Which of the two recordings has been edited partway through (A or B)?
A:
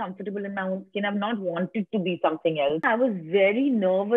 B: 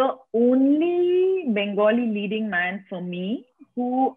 A